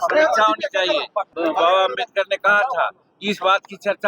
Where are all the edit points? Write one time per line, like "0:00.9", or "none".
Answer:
0:01.3